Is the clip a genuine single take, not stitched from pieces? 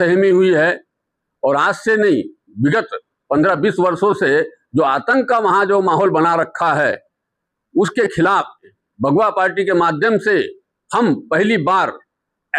no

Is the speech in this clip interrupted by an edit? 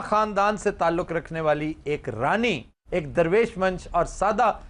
no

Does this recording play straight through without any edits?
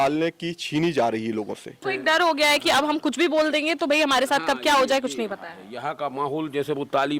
no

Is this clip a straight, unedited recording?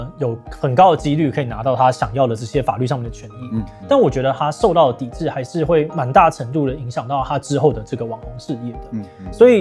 yes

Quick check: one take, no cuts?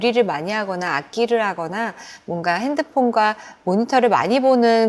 yes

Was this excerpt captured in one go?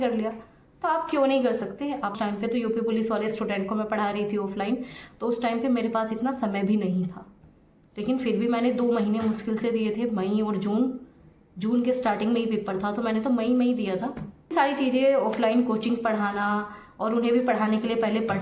no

